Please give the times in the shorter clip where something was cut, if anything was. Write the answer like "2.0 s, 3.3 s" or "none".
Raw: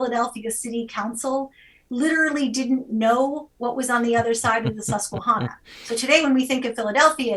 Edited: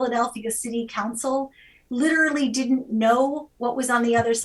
none